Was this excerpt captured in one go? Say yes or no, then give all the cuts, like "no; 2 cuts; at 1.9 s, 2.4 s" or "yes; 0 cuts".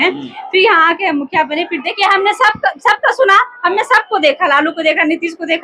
no; 1 cut; at 1.8 s